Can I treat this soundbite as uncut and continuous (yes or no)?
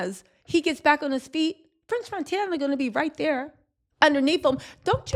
yes